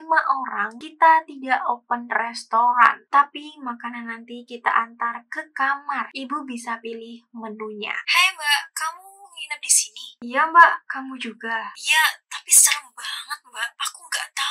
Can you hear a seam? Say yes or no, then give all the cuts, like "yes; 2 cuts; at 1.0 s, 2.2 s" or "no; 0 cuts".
yes; 1 cut; at 8.0 s